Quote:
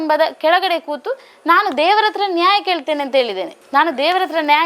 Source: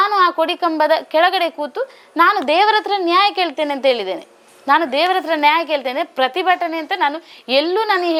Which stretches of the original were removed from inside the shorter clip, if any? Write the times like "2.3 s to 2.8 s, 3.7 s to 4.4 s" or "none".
4.2 s to 4.5 s